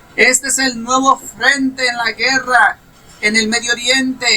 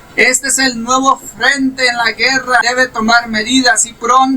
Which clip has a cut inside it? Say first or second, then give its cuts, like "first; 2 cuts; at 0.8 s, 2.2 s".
second; 1 cut; at 2.6 s